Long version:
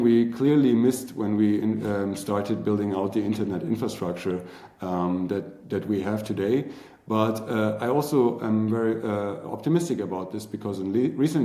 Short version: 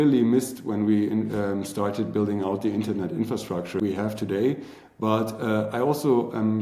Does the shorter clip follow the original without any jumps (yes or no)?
no